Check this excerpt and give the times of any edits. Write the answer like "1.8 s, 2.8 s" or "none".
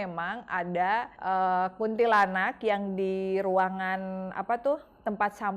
1.1 s